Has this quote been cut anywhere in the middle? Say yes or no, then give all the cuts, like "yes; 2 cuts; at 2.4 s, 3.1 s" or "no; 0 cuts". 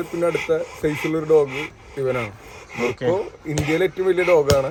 no; 0 cuts